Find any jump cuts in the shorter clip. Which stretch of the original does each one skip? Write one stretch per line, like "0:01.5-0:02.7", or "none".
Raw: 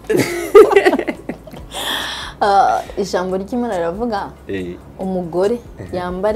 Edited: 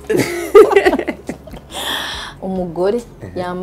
0:02.2-0:04.8